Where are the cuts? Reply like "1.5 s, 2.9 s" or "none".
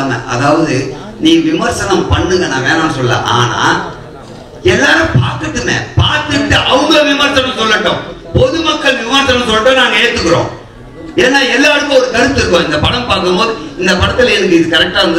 none